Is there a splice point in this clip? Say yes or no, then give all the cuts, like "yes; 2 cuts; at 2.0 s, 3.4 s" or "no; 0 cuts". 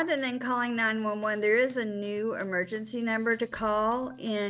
no; 0 cuts